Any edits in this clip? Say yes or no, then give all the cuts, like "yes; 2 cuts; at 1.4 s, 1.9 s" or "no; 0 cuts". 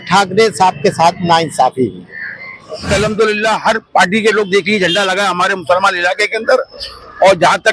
yes; 1 cut; at 2.9 s